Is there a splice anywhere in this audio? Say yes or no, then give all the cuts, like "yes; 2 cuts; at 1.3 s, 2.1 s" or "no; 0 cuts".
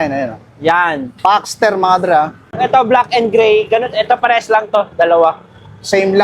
yes; 1 cut; at 2.5 s